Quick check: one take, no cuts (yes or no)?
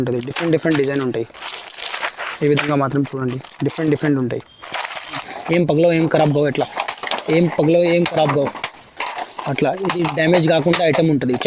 no